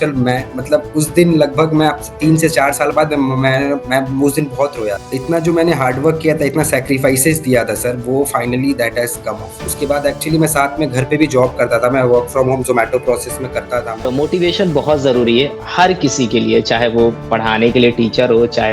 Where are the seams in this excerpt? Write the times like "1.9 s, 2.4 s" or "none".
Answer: 5.1 s, 9.6 s, 14.1 s

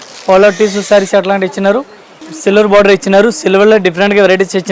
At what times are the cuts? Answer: 2.1 s

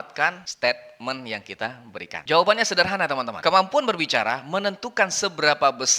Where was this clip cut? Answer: 2.1 s

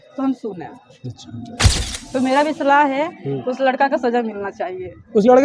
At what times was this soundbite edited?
1.6 s

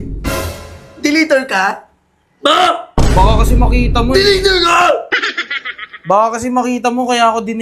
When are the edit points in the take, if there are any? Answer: none

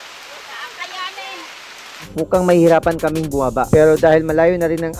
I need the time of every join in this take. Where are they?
2.1 s

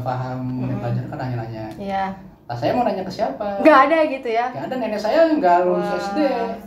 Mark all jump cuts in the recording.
none

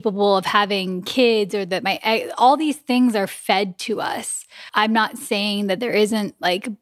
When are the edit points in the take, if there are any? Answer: 4.5 s

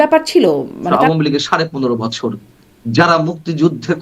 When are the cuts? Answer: 0.9 s

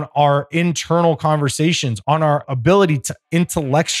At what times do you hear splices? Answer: 2.1 s

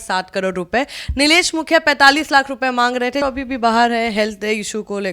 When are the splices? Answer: 3.2 s

